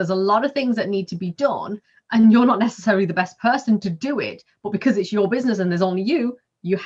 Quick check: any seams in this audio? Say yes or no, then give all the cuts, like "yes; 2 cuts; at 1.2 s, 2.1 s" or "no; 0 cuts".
no; 0 cuts